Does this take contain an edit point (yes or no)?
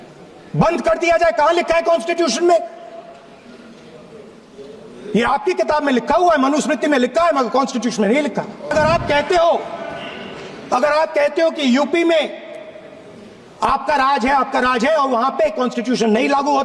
yes